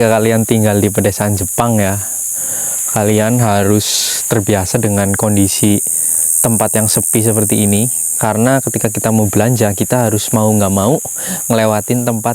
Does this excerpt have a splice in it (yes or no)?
no